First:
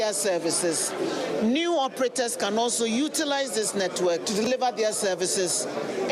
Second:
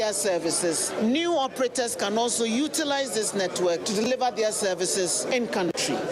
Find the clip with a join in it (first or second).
second